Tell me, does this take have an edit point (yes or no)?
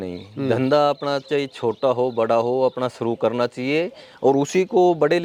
no